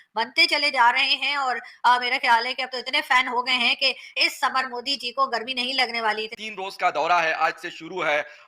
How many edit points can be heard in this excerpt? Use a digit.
1